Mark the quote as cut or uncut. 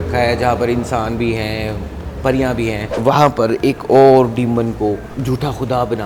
cut